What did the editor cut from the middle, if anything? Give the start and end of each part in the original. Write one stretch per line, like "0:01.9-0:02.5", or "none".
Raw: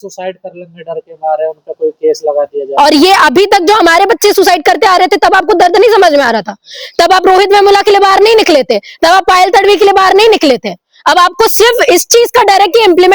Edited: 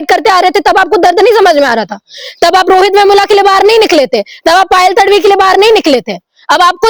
none